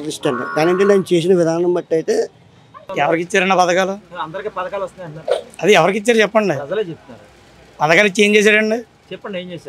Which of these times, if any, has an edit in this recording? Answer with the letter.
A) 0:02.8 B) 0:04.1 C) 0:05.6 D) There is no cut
A